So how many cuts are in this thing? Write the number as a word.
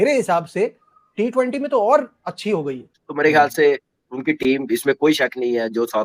one